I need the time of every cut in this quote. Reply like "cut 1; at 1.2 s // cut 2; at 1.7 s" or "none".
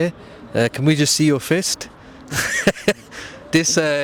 none

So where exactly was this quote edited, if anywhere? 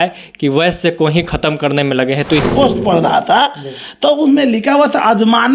cut 1; at 2.5 s

